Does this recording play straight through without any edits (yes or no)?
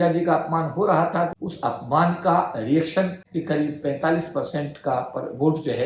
no